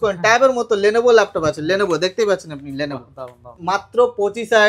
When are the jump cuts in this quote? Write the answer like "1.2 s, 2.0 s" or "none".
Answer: 3.5 s